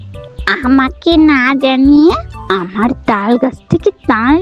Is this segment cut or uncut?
uncut